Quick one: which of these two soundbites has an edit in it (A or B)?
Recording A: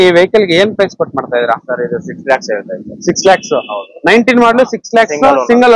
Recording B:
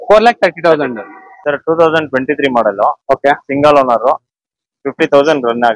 B